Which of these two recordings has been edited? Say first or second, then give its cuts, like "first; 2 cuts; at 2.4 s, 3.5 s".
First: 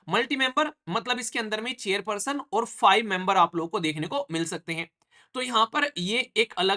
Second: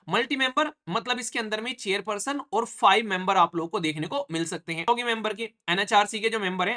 second; 1 cut; at 4.9 s